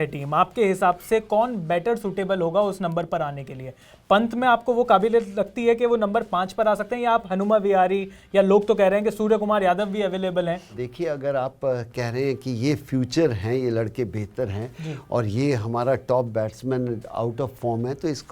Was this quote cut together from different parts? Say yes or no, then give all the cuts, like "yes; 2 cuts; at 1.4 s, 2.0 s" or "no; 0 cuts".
yes; 1 cut; at 10.8 s